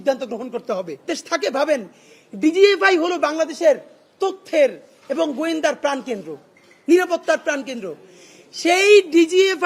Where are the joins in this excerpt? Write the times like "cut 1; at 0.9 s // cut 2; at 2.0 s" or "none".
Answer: cut 1; at 1.1 s